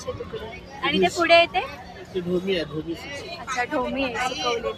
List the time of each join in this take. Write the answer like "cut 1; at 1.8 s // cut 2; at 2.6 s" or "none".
none